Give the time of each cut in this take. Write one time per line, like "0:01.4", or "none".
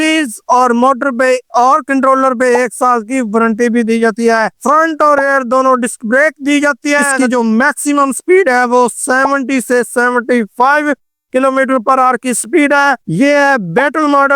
0:04.6
0:07.1
0:13.0